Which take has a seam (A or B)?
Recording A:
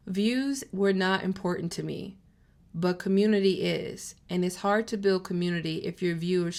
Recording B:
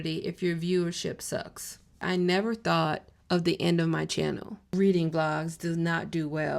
B